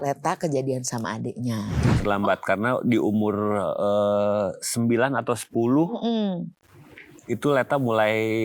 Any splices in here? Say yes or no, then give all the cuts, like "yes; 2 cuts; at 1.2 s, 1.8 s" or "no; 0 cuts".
yes; 1 cut; at 1.8 s